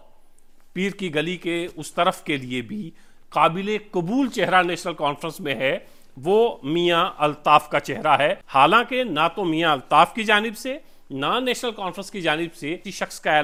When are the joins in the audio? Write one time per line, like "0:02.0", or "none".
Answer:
none

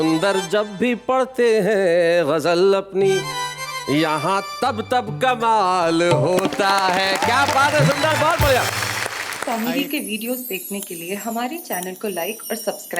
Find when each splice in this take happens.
0:09.3

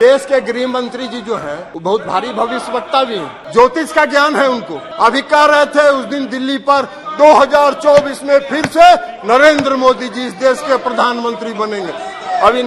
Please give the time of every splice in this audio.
0:01.7
0:03.4
0:04.8

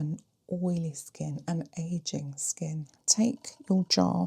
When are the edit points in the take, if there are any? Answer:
0:03.0

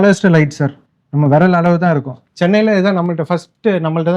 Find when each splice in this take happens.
0:02.2

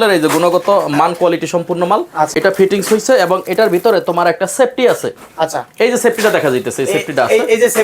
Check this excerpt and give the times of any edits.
0:02.3

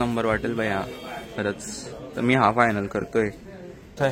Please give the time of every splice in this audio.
none

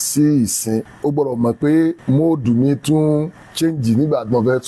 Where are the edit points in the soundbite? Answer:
0:00.9
0:02.0
0:03.4

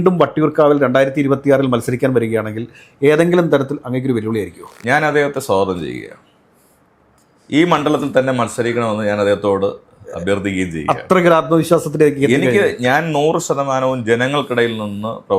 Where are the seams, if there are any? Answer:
none

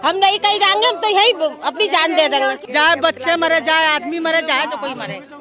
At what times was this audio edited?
0:02.6

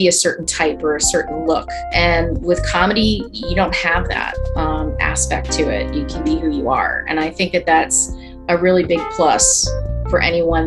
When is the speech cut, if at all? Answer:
0:01.8

